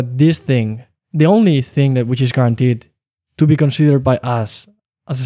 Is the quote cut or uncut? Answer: uncut